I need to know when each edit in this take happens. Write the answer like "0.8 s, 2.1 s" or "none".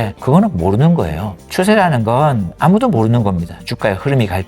none